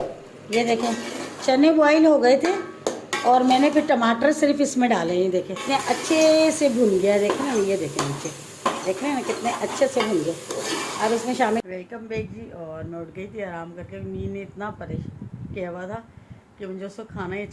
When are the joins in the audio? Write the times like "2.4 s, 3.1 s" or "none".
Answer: 5.5 s, 11.6 s